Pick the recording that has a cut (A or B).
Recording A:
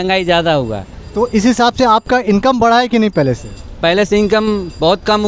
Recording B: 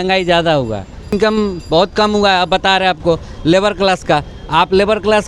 B